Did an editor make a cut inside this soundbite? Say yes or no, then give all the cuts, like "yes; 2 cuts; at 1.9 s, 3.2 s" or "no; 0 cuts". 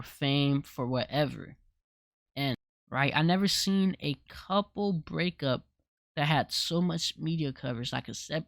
yes; 1 cut; at 2.7 s